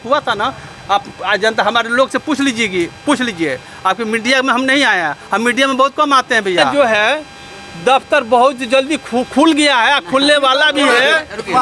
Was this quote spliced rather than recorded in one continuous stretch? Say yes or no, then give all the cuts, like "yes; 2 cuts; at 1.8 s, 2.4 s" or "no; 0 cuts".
yes; 1 cut; at 6.8 s